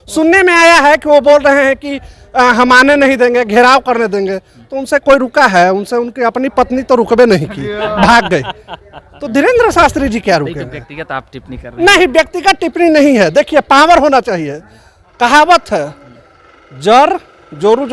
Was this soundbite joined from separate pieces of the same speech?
no; 0 cuts

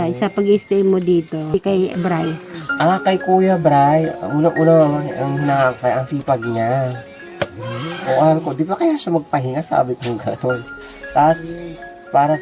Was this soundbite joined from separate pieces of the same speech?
yes; 1 cut; at 1.5 s

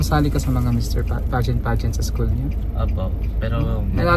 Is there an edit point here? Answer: no; 0 cuts

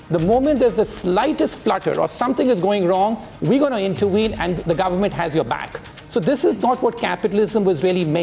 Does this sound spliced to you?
yes; 1 cut; at 4.6 s

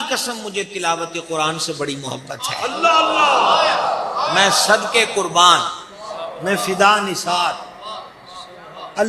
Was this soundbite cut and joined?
no; 0 cuts

